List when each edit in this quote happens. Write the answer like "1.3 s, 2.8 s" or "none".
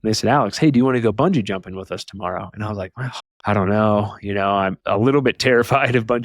4.8 s